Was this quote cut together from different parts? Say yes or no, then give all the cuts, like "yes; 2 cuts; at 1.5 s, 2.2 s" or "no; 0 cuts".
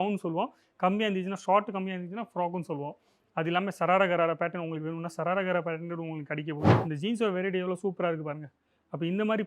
yes; 1 cut; at 6.8 s